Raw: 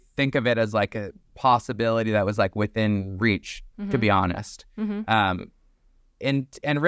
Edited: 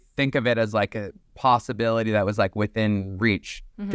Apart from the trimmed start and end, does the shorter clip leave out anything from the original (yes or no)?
no